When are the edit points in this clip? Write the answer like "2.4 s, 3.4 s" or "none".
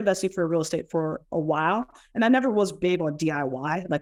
none